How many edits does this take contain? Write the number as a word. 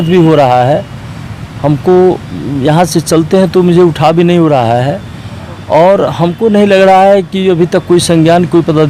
zero